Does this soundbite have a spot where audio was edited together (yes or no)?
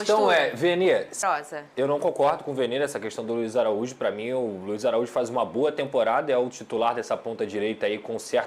yes